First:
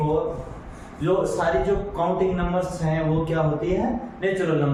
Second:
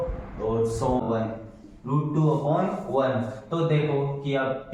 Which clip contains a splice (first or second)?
second